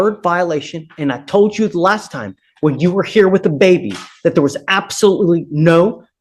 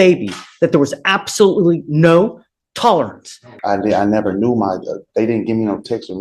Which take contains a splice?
second; 1 cut; at 3.5 s

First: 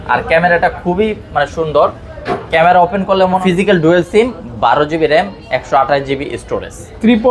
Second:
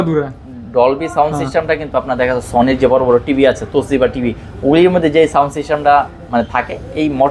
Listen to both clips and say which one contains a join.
first; 1 cut; at 3.4 s

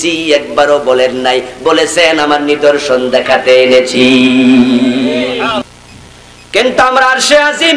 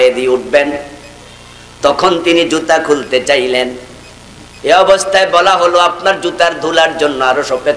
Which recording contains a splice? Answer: first; 1 cut; at 5.7 s

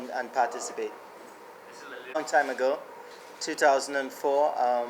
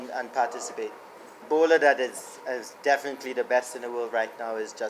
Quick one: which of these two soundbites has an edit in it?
second; 1 cut; at 1.4 s

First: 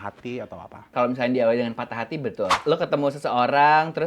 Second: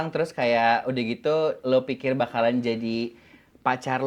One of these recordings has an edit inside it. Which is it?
first; 2 cuts; at 0.9 s, 2.6 s

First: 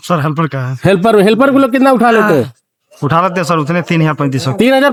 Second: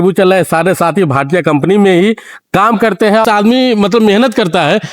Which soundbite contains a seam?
second; 1 cut; at 3.2 s

